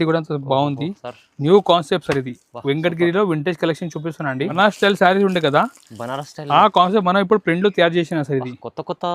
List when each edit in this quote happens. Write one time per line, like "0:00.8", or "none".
0:04.5